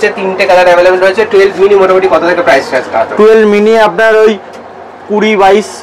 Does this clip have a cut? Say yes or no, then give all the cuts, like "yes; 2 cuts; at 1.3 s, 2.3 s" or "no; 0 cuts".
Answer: no; 0 cuts